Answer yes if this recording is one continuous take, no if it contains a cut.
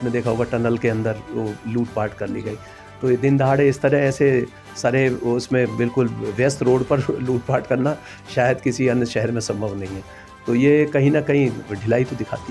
yes